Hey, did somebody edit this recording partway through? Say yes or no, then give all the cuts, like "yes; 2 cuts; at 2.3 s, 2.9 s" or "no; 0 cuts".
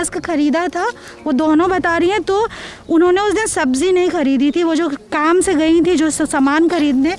no; 0 cuts